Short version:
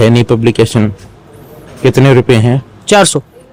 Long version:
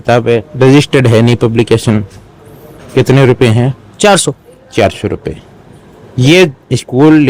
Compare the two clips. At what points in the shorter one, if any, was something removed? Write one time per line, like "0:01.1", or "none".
none